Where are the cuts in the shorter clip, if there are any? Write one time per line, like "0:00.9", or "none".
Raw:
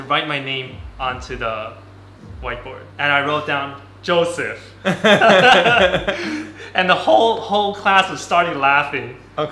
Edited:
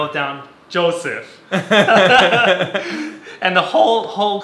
none